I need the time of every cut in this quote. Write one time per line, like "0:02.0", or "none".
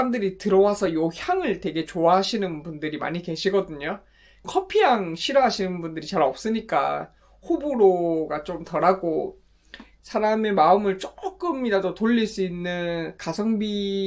none